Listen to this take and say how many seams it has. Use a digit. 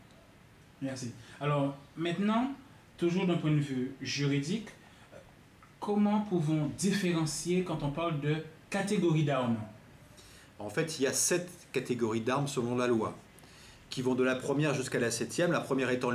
1